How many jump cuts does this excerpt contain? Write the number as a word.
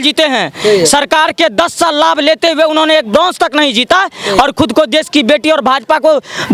zero